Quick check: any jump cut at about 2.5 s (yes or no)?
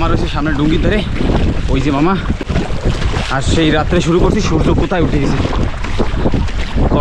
no